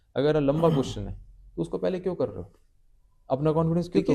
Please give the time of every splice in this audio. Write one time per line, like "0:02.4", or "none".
none